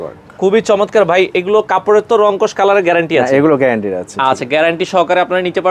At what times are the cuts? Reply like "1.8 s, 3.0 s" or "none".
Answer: none